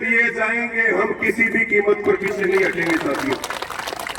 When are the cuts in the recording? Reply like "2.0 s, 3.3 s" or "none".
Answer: none